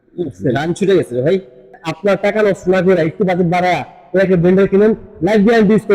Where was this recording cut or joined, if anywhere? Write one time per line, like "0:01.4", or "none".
0:01.9